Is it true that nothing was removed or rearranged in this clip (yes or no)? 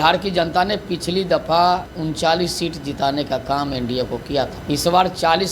no